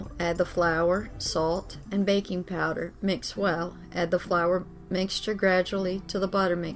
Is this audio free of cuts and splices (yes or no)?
yes